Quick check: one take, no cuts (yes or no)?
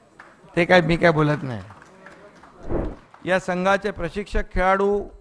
no